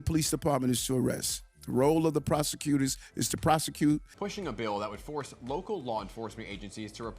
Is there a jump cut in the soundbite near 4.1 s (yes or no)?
yes